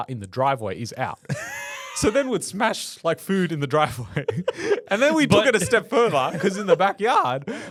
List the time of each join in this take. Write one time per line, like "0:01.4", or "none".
none